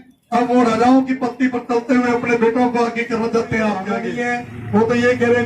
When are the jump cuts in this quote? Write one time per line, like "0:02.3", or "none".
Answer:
0:04.0

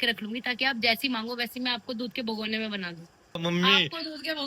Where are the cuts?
0:03.4

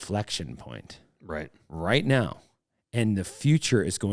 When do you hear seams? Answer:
none

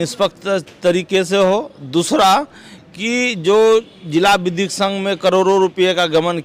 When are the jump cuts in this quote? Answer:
none

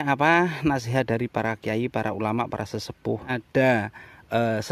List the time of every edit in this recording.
0:03.4

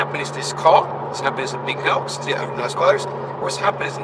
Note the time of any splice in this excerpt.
none

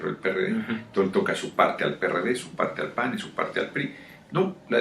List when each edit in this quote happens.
0:02.5

